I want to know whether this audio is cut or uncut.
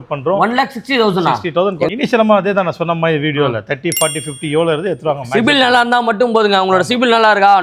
cut